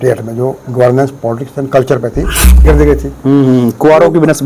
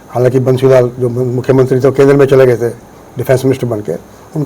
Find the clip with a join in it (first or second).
first